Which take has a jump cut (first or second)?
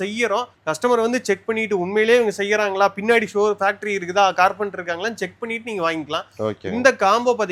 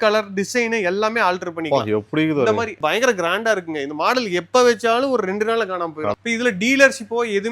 second